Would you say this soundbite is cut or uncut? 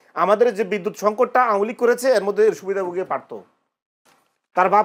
uncut